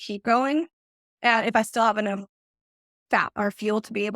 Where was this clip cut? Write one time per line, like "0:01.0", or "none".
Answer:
0:01.7